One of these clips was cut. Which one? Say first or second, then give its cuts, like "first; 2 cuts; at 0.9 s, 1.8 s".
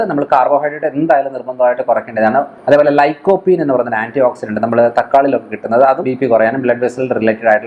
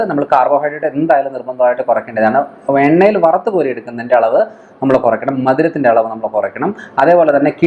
first; 2 cuts; at 2.5 s, 6.1 s